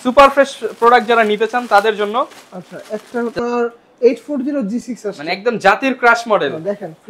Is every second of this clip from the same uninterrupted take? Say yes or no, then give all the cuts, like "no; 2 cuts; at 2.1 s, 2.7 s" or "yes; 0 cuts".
no; 1 cut; at 3.4 s